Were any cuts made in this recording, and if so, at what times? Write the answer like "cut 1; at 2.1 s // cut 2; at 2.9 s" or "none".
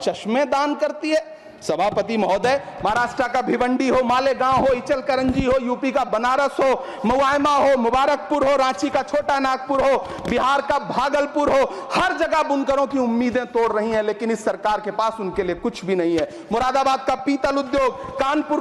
none

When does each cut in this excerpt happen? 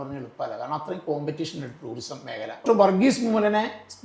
cut 1; at 2.6 s

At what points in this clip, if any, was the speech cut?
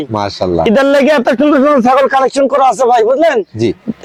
none

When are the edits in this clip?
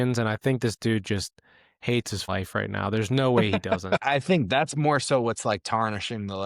cut 1; at 2.2 s // cut 2; at 3.9 s

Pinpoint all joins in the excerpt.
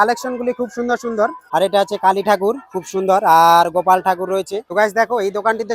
cut 1; at 1.4 s // cut 2; at 4.7 s

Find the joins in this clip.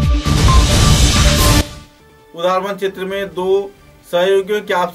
none

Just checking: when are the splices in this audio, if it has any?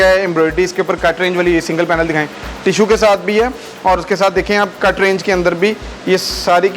none

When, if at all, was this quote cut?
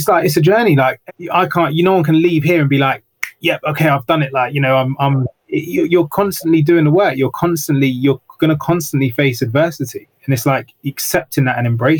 cut 1; at 1.0 s

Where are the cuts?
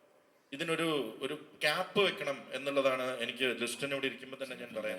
none

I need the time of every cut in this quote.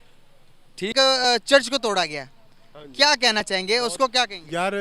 cut 1; at 0.9 s

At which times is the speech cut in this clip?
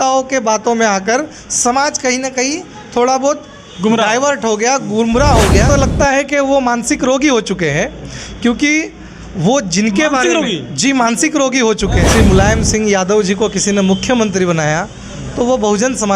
cut 1; at 5.7 s // cut 2; at 12.0 s

